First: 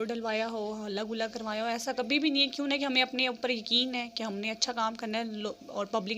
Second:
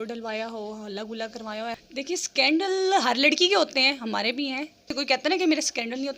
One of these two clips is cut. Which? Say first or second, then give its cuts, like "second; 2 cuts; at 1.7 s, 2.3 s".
second; 2 cuts; at 1.8 s, 4.9 s